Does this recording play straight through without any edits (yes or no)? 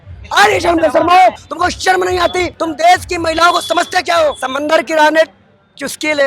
no